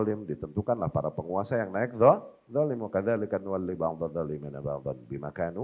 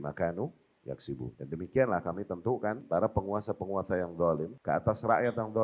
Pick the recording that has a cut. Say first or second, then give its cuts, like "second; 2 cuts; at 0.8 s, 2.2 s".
second; 3 cuts; at 1.4 s, 2.8 s, 4.5 s